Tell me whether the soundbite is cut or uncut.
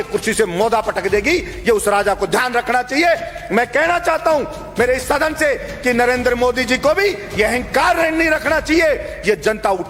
uncut